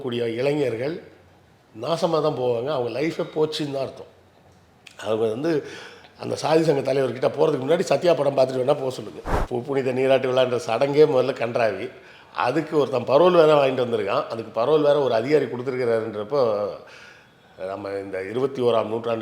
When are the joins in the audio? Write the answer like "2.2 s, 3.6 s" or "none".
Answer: 9.3 s